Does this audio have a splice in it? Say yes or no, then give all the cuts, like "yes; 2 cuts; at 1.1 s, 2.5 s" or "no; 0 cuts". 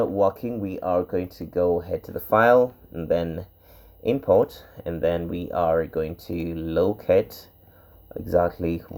no; 0 cuts